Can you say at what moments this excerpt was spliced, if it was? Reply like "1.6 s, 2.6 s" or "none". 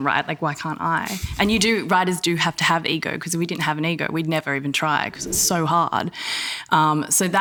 none